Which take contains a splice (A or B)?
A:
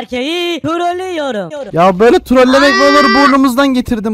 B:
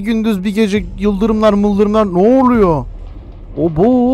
A